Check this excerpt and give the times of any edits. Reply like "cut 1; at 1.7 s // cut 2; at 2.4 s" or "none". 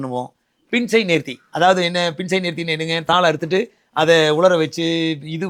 none